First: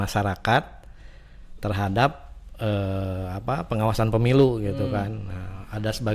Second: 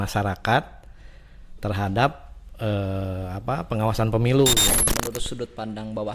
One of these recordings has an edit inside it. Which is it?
second; 1 cut; at 4.8 s

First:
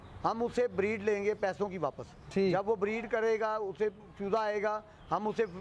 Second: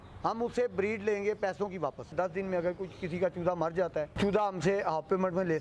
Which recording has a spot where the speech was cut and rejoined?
second; 2 cuts; at 2.1 s, 4.1 s

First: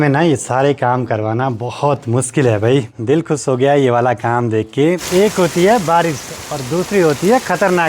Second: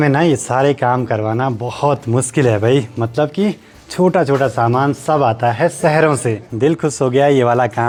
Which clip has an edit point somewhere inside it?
first; 2 cuts; at 2.9 s, 5.0 s

